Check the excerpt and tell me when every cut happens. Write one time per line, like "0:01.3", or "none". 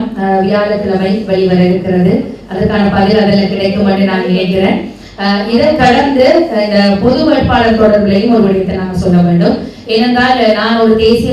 none